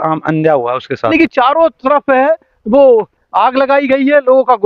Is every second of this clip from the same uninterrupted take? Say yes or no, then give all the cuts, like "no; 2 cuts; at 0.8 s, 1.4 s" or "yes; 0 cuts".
no; 1 cut; at 1.1 s